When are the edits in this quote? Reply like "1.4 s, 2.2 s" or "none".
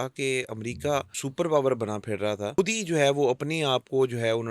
1.2 s, 2.5 s